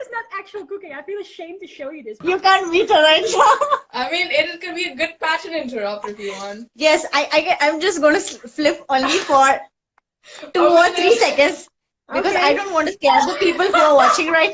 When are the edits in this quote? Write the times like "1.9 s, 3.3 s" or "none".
2.1 s

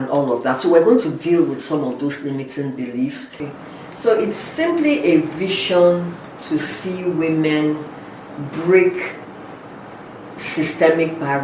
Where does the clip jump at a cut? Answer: 3.4 s

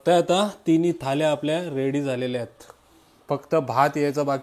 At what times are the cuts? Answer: none

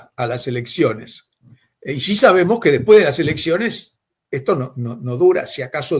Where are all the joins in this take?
none

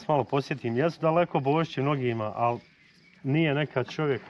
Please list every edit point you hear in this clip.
none

